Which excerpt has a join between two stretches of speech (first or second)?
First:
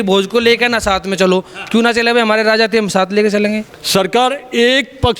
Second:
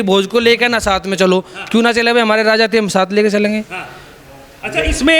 first